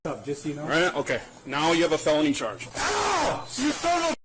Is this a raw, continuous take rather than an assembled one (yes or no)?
no